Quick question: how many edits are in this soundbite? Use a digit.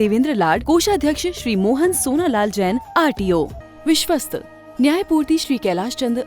1